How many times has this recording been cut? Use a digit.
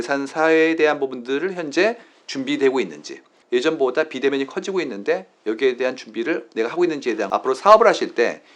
2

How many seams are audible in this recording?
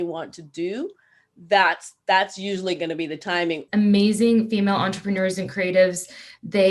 1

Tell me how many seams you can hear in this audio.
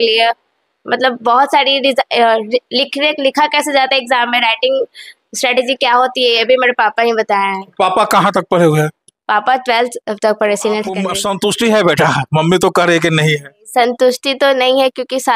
1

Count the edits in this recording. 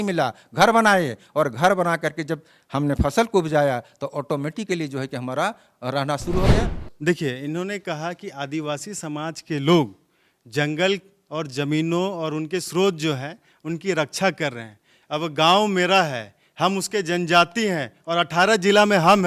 1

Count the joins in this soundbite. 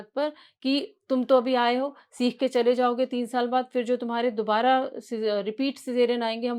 0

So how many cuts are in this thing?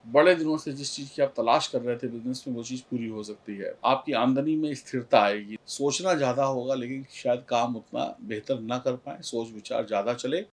2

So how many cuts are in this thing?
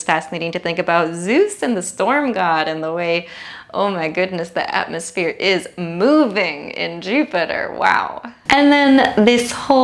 0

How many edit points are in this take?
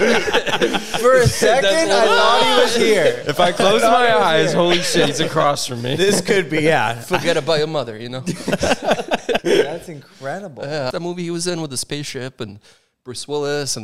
2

